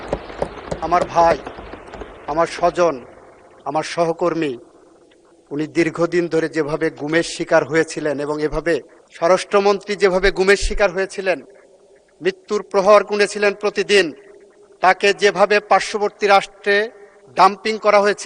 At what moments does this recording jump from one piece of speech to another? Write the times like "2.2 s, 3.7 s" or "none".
9.0 s